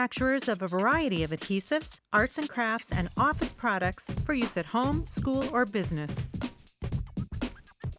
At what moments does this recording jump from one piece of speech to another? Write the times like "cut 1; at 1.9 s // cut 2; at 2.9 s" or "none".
cut 1; at 6.1 s